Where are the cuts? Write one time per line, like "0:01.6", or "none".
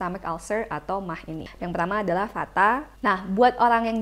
0:01.5
0:02.9